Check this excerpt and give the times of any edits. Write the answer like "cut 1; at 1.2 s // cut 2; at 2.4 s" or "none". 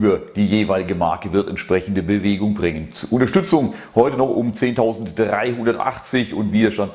cut 1; at 5.0 s